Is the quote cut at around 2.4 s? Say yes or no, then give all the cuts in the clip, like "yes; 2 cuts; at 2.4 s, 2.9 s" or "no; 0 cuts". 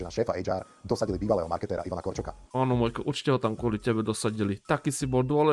yes; 1 cut; at 2.4 s